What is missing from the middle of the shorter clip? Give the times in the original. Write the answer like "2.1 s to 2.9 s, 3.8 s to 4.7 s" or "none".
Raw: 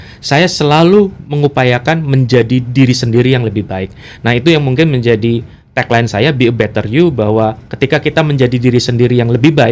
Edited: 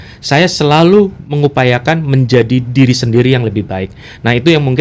none